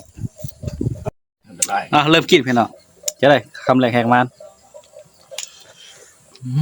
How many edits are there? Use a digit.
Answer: 1